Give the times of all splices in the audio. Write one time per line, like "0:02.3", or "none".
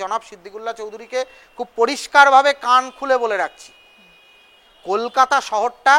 none

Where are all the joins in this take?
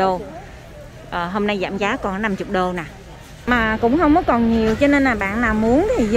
0:03.4

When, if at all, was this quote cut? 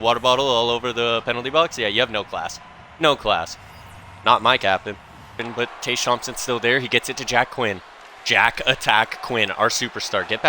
0:05.4

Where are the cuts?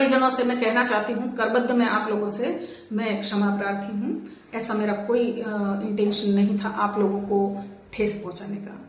none

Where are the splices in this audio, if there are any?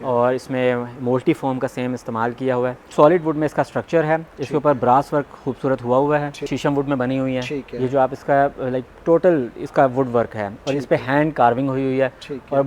0:02.9
0:06.5

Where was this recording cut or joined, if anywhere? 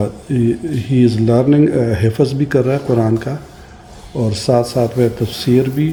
none

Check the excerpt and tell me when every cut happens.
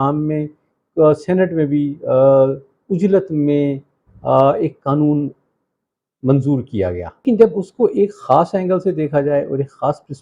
0:07.2

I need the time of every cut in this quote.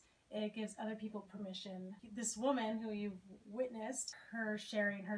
0:02.0
0:04.2

